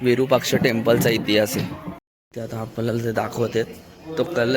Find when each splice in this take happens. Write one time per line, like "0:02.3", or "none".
0:02.3